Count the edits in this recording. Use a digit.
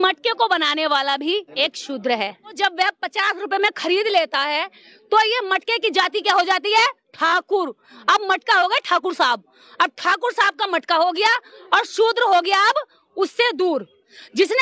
2